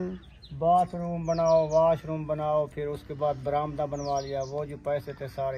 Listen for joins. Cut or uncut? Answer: uncut